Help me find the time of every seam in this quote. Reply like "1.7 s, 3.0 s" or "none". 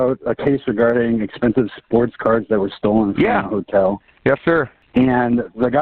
4.7 s